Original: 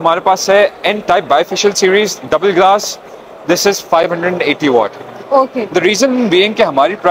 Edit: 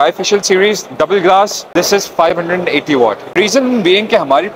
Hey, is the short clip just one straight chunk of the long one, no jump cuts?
no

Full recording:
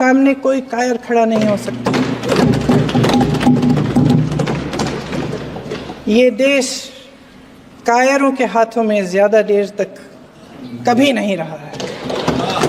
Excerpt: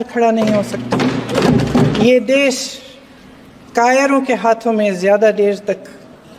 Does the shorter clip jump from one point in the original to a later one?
yes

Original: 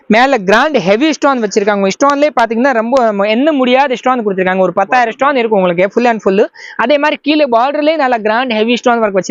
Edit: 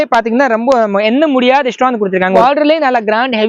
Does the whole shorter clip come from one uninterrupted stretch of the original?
no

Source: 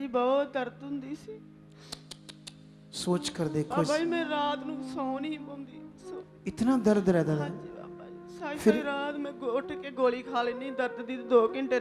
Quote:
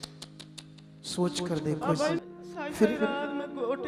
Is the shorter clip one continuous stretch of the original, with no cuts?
no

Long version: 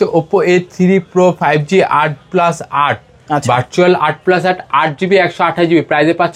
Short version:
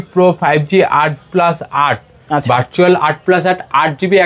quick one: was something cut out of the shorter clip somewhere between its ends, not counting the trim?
no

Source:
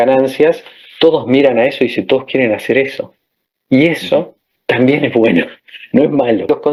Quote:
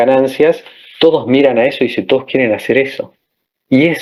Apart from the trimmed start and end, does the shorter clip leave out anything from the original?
no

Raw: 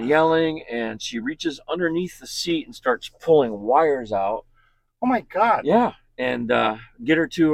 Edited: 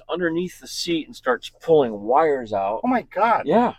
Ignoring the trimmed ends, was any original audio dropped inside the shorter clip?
yes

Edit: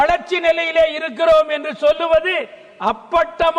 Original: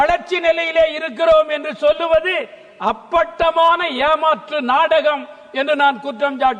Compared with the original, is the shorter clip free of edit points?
yes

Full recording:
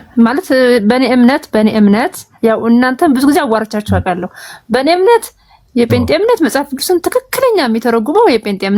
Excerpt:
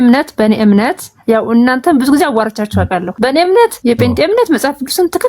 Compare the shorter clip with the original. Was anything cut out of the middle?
yes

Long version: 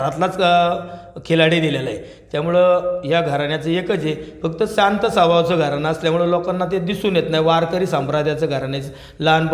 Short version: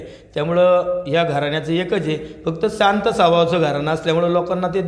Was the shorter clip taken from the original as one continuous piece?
yes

